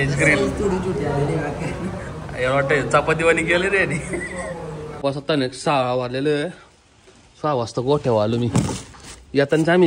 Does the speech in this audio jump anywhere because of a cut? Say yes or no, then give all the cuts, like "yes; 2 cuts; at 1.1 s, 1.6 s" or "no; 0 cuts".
yes; 1 cut; at 4.8 s